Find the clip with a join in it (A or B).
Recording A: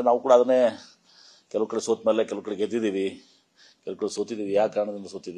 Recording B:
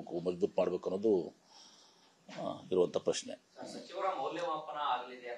A